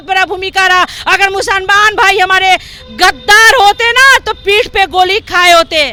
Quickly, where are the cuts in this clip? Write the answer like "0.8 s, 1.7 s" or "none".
none